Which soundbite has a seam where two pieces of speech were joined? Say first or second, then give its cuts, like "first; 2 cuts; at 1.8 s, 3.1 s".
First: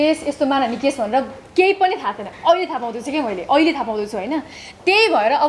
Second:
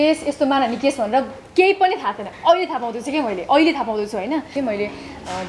second; 1 cut; at 4.5 s